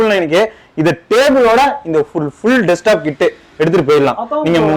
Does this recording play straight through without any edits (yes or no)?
yes